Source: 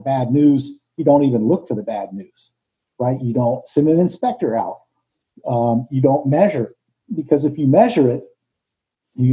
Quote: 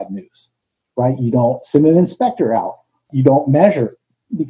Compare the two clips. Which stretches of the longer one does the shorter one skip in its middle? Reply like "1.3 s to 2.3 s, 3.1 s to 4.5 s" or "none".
5.1 s to 5.9 s